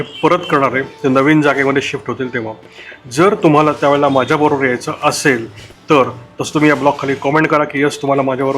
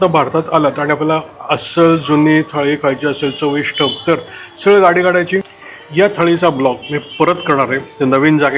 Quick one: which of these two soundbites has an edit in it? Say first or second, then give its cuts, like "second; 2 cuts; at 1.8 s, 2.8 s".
second; 1 cut; at 5.6 s